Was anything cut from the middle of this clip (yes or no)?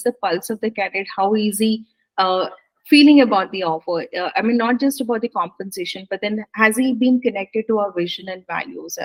no